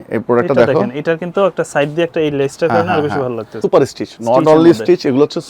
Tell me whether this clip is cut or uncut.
cut